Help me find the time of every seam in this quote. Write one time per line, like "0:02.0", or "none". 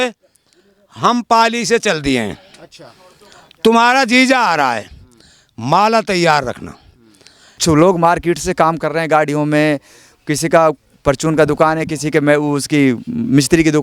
0:07.6